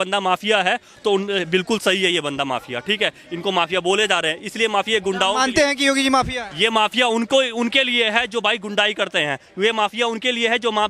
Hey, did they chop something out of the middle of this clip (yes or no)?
no